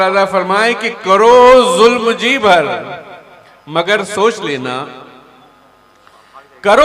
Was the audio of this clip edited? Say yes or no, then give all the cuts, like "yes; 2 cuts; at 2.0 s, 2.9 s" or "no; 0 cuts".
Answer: no; 0 cuts